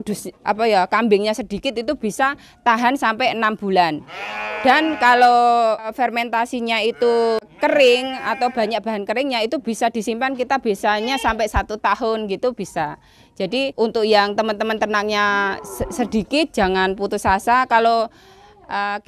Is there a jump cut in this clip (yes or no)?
no